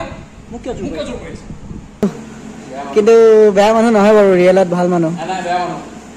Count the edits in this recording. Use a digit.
1